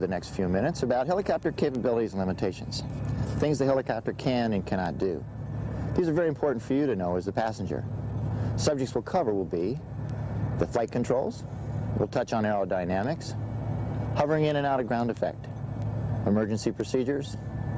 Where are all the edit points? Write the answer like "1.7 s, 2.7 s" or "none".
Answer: 14.5 s

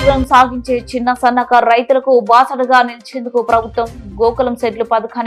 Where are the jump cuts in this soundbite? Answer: none

